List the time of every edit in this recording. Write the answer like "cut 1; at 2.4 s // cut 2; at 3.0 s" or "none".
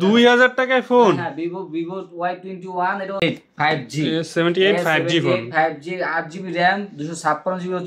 cut 1; at 3.2 s